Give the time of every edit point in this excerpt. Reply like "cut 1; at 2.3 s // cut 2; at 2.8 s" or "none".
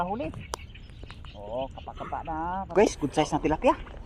cut 1; at 2.7 s